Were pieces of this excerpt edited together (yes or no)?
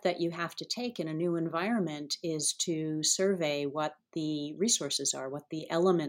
no